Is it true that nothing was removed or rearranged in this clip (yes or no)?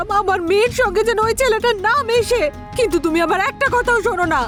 yes